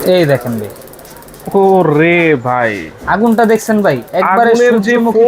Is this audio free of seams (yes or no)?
yes